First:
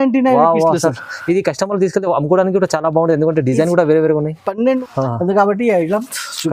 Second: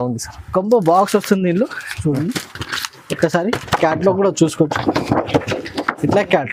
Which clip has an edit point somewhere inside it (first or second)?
first